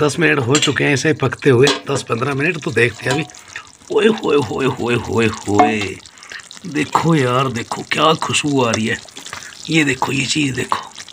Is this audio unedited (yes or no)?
yes